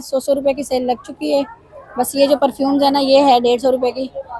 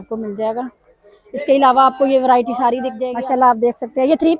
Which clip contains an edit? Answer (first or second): second